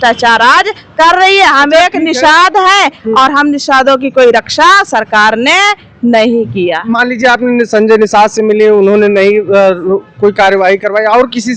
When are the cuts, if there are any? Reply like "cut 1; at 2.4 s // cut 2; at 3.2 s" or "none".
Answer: none